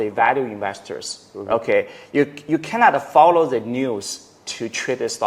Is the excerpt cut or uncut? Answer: uncut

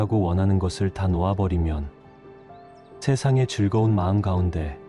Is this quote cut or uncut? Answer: uncut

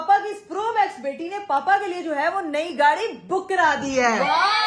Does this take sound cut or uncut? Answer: uncut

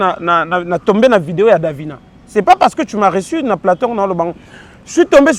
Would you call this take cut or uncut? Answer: uncut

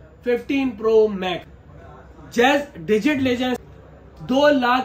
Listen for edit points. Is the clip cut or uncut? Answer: cut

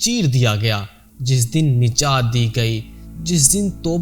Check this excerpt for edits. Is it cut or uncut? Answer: uncut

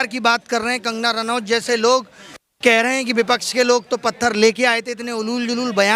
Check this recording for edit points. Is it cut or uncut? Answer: uncut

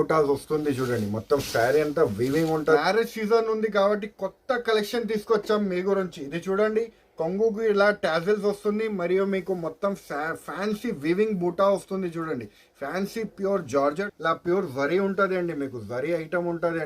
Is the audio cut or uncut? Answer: cut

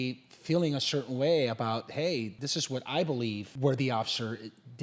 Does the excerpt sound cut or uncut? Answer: cut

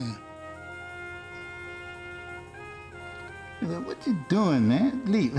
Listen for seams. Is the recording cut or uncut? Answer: cut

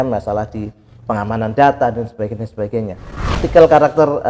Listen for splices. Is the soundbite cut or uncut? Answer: cut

